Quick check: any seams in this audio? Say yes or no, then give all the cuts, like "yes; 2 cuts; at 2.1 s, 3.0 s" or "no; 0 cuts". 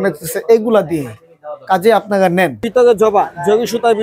yes; 1 cut; at 2.6 s